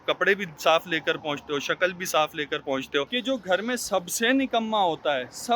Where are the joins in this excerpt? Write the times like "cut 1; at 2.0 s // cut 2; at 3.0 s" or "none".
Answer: cut 1; at 3.1 s